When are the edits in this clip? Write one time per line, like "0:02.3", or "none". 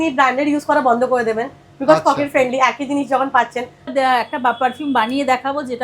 0:03.9